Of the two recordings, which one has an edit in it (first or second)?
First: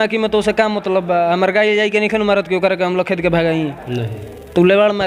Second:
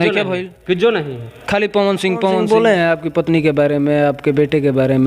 second